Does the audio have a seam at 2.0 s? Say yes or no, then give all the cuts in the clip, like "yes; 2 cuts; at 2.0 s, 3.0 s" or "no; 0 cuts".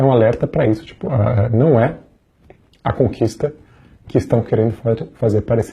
no; 0 cuts